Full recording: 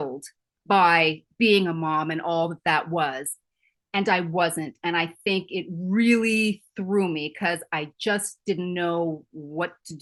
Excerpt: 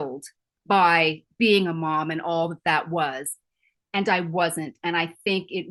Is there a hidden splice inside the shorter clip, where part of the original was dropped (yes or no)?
no